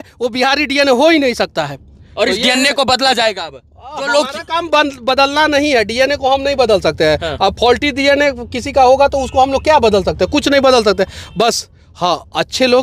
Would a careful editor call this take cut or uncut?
uncut